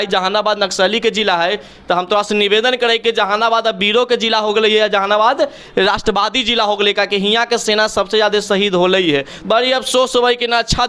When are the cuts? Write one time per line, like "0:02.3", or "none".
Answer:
0:09.3